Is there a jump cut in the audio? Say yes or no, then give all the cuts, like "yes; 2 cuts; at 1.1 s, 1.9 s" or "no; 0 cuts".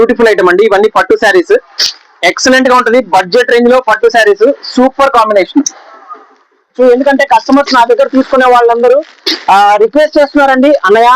yes; 1 cut; at 6.7 s